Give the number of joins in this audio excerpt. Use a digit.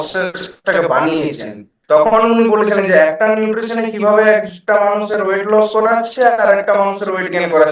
1